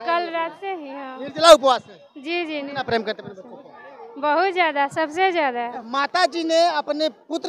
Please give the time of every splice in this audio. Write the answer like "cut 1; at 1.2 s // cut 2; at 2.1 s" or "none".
cut 1; at 5.8 s